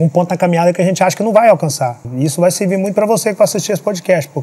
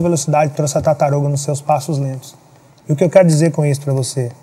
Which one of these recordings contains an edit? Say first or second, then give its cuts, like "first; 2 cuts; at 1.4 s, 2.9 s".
first; 1 cut; at 2.1 s